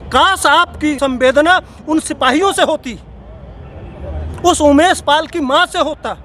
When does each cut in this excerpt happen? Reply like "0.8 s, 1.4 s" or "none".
1.0 s